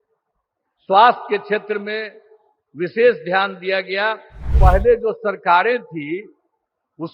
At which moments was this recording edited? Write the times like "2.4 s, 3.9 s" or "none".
4.5 s